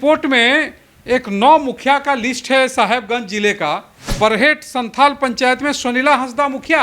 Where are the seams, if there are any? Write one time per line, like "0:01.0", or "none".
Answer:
0:04.1